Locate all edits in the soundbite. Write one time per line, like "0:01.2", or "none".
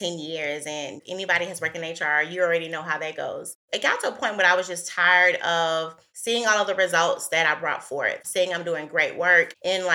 0:01.0
0:08.2